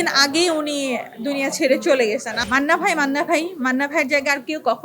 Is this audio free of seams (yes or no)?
no